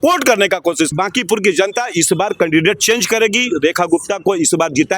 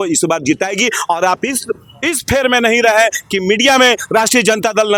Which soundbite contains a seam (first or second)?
first